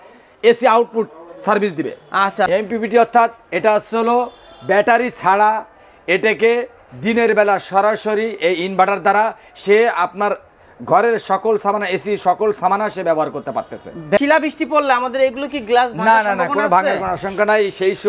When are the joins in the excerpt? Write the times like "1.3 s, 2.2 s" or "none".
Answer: 2.5 s, 14.2 s